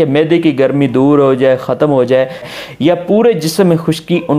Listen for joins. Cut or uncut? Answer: cut